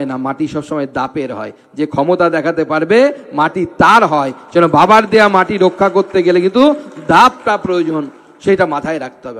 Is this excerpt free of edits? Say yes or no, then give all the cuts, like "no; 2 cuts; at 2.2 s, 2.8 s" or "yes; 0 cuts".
yes; 0 cuts